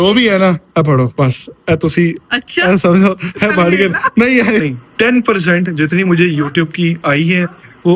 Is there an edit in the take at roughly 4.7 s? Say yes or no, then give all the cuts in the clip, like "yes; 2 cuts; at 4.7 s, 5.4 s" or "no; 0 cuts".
yes; 1 cut; at 4.7 s